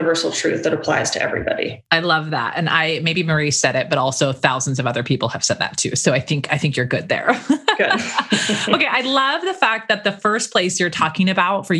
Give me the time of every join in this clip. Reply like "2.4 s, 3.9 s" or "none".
none